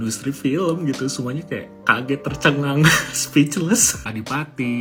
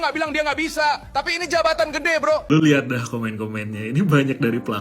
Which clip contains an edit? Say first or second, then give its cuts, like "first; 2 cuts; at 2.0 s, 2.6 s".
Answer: second; 1 cut; at 2.4 s